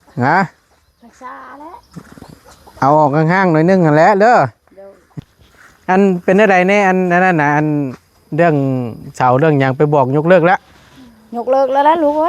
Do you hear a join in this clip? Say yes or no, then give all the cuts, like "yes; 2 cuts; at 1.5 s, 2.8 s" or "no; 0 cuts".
yes; 1 cut; at 5.2 s